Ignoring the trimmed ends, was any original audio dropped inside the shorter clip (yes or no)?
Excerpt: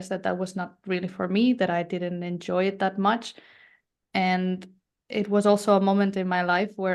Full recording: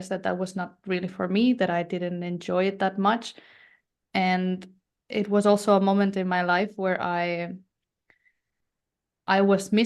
no